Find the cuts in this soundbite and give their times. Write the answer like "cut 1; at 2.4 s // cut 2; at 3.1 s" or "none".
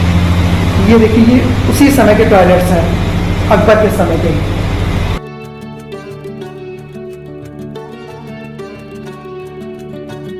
none